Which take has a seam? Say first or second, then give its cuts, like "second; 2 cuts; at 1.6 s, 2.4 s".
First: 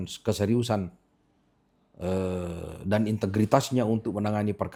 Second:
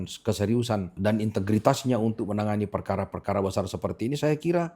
second; 1 cut; at 0.9 s